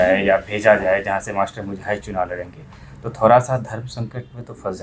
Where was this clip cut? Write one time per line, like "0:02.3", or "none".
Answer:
none

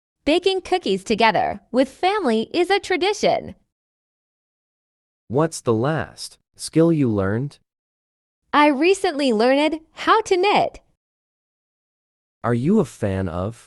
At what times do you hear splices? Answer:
none

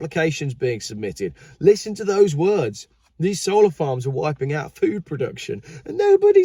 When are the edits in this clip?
none

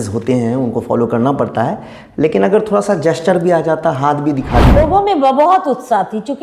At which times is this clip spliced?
0:04.8

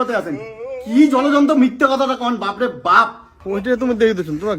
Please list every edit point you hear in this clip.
0:03.6

